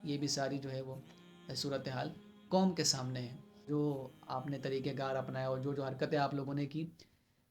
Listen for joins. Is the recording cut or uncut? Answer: cut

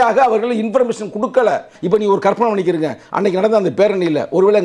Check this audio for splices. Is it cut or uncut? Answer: cut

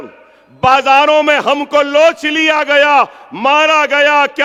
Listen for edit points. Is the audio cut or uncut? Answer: uncut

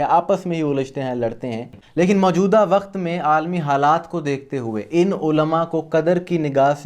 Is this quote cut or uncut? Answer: cut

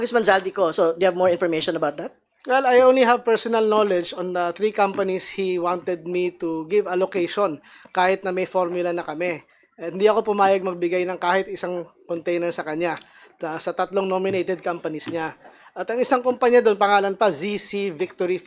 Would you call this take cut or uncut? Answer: uncut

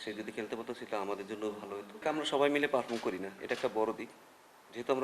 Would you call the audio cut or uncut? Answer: cut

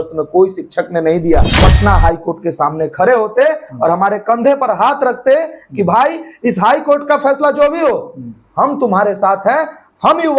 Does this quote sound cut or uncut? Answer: cut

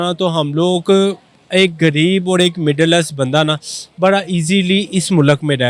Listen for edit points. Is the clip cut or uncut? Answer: uncut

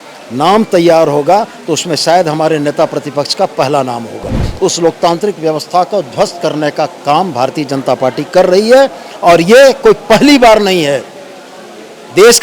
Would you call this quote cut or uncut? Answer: cut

